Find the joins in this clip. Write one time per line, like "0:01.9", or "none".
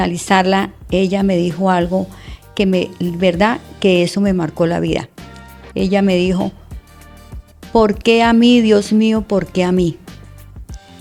none

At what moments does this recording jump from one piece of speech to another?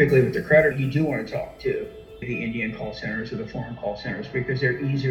0:00.7
0:02.3

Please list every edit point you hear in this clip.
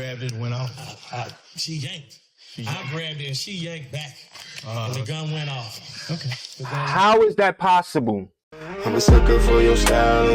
0:08.7

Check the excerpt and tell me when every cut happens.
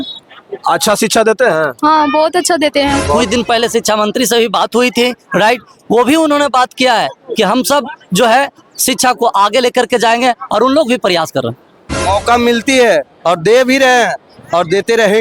0:03.2
0:12.0

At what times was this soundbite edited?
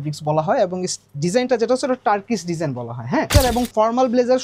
0:03.3

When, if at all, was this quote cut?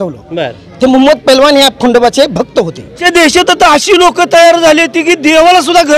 0:03.0

